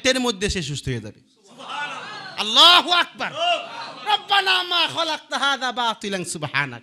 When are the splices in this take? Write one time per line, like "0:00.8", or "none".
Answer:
none